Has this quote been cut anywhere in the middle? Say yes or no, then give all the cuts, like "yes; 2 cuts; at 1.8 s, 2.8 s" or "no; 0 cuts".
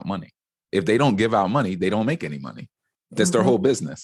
no; 0 cuts